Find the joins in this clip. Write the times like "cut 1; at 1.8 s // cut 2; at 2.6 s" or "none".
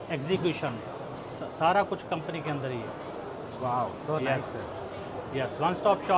none